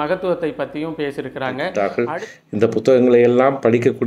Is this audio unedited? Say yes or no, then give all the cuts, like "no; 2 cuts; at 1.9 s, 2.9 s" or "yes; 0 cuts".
no; 1 cut; at 1.6 s